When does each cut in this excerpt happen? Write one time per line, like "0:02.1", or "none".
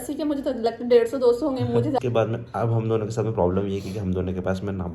0:02.0